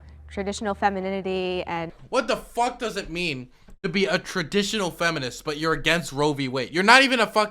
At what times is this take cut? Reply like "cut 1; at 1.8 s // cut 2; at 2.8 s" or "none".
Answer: cut 1; at 1.9 s